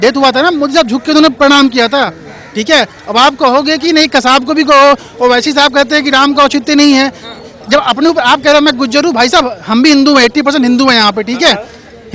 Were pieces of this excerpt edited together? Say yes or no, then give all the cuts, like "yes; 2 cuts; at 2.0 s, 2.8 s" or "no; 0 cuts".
no; 0 cuts